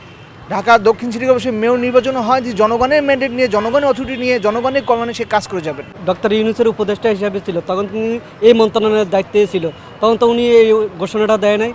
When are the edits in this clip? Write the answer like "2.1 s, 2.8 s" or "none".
none